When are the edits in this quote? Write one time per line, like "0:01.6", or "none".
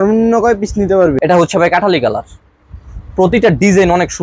0:01.2